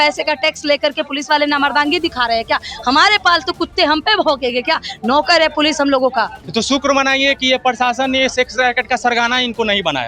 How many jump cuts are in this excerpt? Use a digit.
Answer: 1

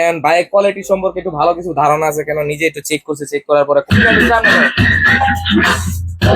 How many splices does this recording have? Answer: 1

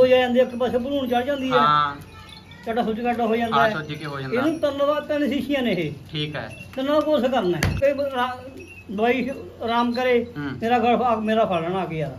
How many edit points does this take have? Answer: 1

